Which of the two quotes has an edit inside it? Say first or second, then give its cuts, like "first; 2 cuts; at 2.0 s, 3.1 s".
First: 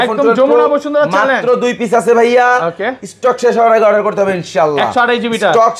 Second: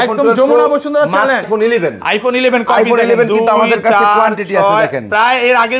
second; 1 cut; at 1.4 s